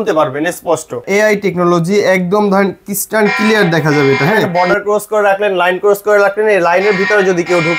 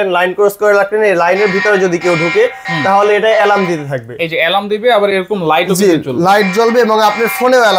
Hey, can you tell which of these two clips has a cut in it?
first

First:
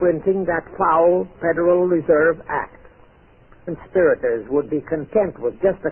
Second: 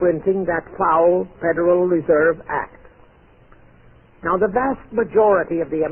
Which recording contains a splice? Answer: second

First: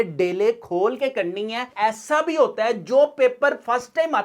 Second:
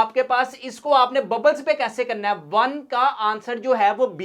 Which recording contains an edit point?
first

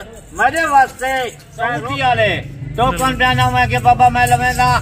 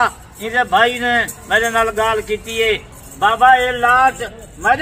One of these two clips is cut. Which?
first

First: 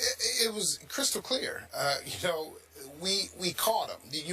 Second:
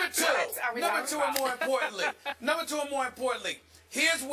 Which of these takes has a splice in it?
first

